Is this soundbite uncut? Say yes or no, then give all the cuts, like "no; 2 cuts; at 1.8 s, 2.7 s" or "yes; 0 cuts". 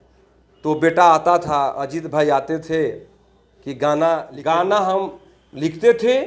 no; 1 cut; at 4.3 s